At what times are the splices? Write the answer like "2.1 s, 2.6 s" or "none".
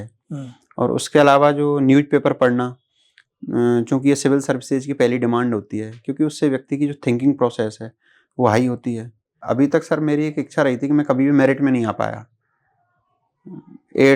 9.4 s